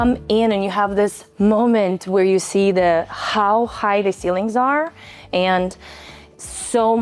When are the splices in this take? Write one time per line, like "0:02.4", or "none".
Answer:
0:01.2
0:05.2